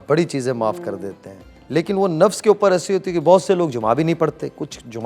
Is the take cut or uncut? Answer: uncut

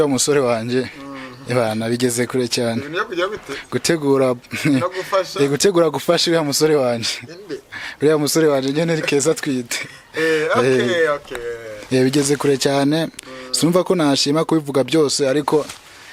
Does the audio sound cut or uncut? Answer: uncut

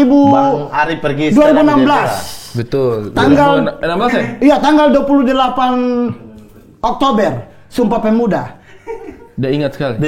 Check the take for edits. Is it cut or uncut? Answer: uncut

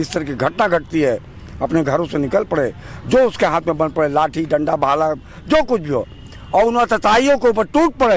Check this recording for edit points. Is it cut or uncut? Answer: uncut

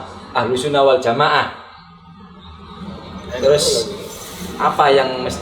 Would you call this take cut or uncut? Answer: uncut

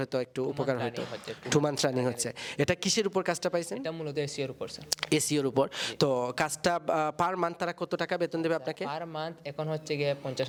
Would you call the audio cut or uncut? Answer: uncut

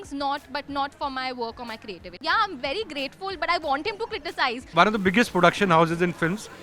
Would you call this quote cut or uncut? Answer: cut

